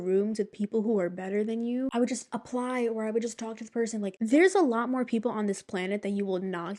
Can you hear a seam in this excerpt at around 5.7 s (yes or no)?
no